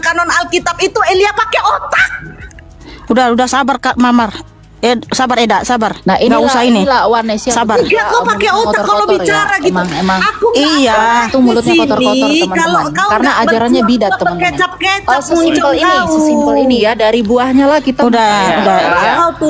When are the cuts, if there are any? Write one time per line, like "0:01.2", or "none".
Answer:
none